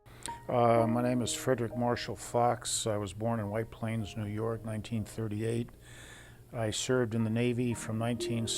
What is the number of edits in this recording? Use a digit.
1